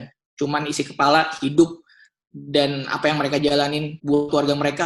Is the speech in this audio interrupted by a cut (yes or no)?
no